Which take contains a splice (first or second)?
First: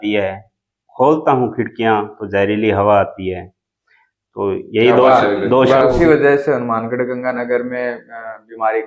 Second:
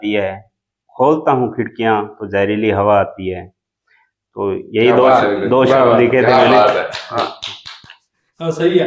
first